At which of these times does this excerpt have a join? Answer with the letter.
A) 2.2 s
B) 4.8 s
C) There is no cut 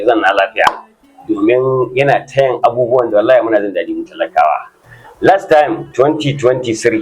B